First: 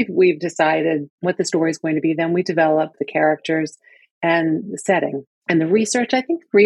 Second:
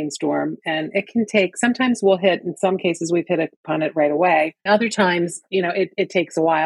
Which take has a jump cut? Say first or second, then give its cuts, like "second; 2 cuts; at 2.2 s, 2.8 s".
first; 1 cut; at 1.1 s